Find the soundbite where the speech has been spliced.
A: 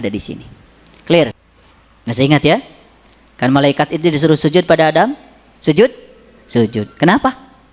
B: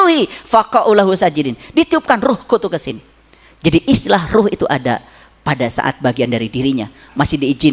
A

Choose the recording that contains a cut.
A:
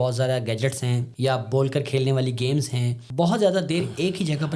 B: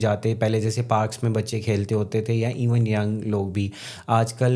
A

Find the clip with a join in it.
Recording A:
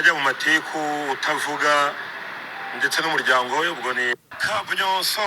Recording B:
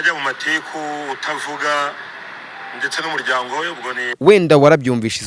B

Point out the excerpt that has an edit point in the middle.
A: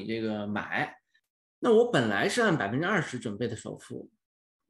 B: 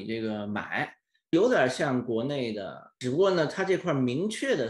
A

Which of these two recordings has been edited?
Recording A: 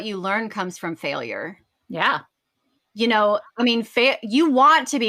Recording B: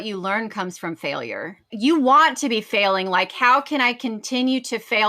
B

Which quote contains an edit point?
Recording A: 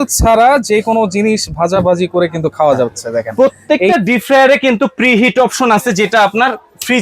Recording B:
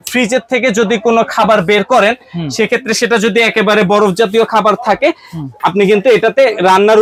A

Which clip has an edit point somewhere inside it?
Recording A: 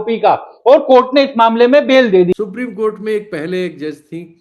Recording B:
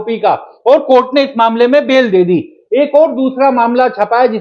A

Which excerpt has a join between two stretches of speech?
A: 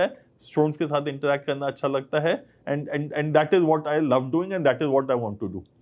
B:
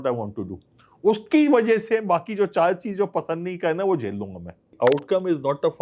B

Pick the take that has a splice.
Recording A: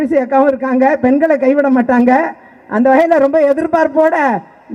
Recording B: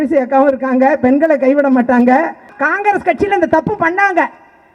B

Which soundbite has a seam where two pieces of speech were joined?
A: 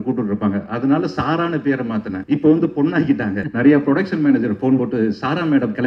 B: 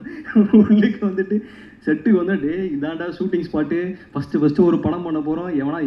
A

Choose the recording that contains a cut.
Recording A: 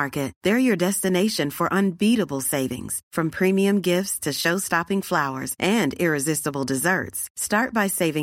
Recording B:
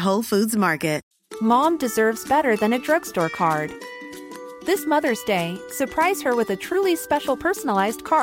B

